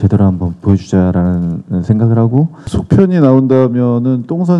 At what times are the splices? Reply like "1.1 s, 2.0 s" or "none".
2.7 s